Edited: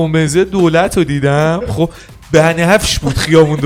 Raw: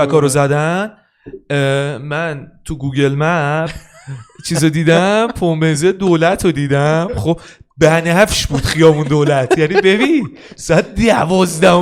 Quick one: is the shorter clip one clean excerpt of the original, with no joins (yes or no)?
yes